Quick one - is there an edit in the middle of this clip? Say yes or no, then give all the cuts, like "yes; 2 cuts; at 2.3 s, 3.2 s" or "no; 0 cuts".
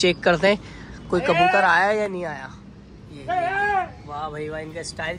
no; 0 cuts